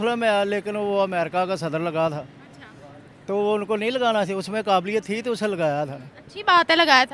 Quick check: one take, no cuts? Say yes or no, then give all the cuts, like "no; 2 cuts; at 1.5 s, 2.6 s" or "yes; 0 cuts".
yes; 0 cuts